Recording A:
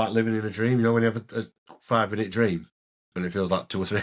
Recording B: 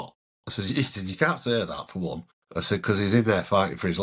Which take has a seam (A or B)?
B